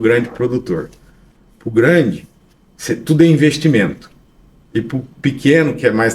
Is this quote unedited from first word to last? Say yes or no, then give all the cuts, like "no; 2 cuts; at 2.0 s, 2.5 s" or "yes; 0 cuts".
yes; 0 cuts